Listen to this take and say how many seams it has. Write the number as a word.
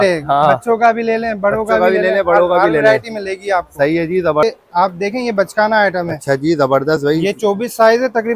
one